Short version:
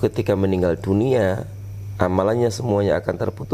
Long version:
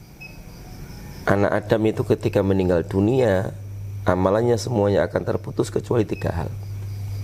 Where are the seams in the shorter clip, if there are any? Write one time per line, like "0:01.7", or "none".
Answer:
none